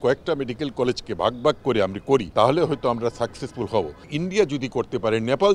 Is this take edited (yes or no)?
yes